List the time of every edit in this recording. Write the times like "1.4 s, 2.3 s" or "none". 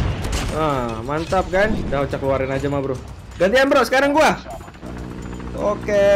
1.8 s

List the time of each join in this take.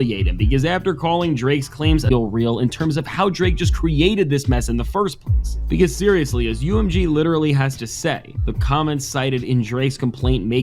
2.1 s

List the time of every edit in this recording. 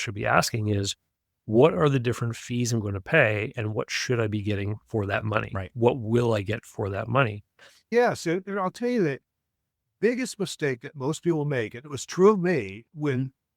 7.9 s

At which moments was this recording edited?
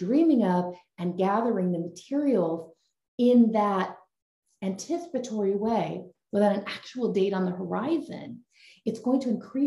none

